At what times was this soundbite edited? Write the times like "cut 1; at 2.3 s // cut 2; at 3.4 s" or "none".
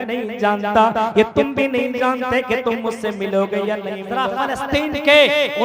cut 1; at 4.0 s

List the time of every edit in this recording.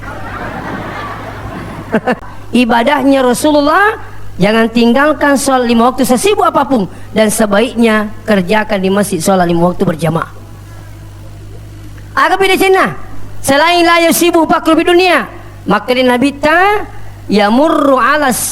cut 1; at 2.2 s

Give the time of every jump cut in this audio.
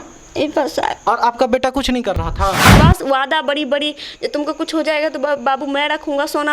cut 1; at 2.7 s

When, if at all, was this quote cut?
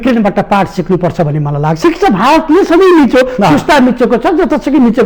cut 1; at 1.8 s

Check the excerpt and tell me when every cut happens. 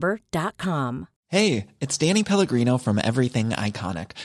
cut 1; at 1.1 s

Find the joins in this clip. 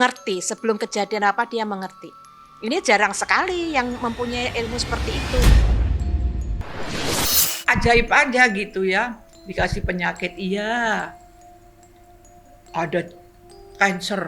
cut 1; at 5.4 s

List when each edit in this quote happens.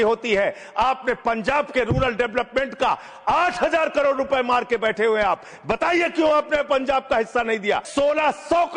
cut 1; at 7.9 s

